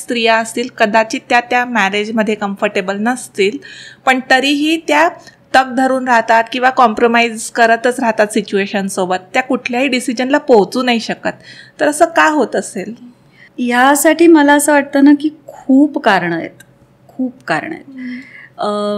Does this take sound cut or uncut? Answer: uncut